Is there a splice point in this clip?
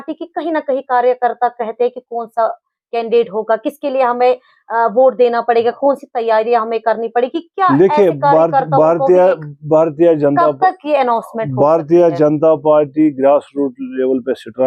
no; 0 cuts

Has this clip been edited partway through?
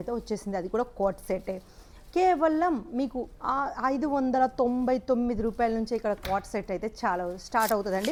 no; 0 cuts

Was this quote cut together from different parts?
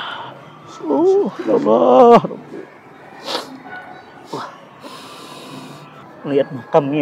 yes; 1 cut; at 6.0 s

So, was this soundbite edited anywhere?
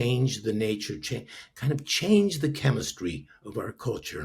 no; 0 cuts

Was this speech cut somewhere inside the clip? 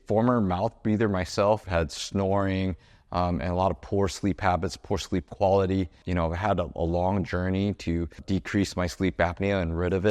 yes; 3 cuts; at 1.6 s, 6.0 s, 8.2 s

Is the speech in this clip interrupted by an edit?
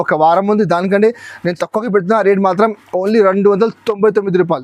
no; 0 cuts

